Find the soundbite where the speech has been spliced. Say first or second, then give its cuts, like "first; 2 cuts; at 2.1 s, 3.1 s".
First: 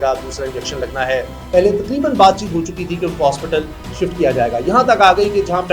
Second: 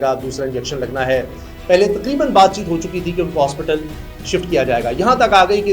first; 2 cuts; at 1.4 s, 3.8 s